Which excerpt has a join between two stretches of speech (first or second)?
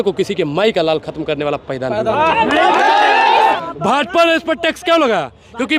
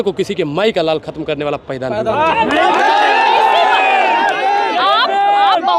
first